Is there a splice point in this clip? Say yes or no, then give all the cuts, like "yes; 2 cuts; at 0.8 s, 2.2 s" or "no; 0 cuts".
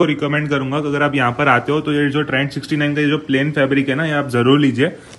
no; 0 cuts